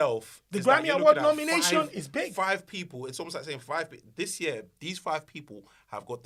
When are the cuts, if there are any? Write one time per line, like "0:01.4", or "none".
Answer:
none